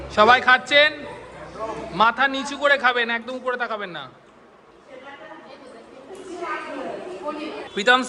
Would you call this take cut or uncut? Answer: uncut